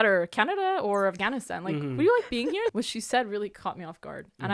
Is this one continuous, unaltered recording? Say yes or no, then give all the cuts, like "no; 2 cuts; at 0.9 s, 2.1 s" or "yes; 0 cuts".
no; 1 cut; at 2.7 s